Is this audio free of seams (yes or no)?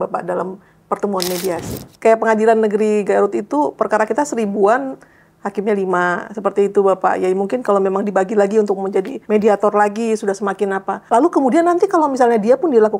no